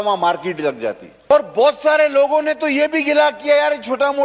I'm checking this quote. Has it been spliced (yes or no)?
yes